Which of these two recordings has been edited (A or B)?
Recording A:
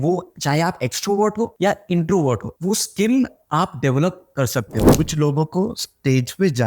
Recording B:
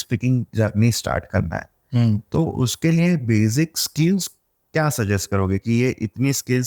A